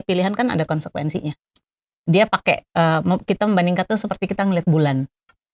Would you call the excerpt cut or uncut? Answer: cut